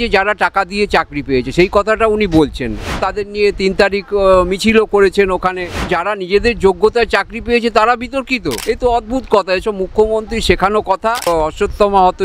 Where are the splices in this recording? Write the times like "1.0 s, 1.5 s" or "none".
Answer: 3.1 s, 5.9 s, 8.5 s, 11.3 s